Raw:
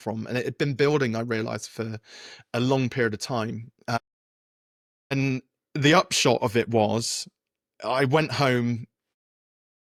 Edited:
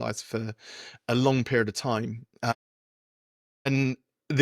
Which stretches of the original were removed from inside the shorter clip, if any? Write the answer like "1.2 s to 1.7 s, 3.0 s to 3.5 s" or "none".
none